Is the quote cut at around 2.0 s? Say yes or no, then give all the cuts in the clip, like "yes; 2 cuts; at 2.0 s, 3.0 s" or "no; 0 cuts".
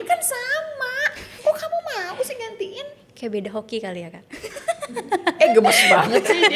no; 0 cuts